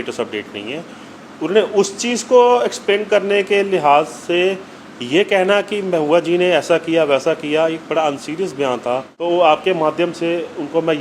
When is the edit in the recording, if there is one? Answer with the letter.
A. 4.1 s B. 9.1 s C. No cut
B